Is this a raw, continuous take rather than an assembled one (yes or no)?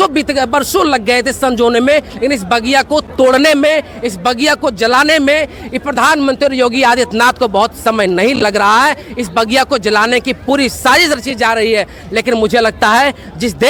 yes